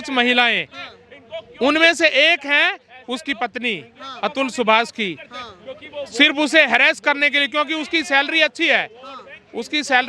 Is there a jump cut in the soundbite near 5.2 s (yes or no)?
no